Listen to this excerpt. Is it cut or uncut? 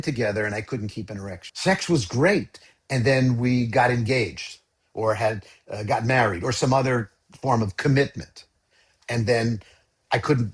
cut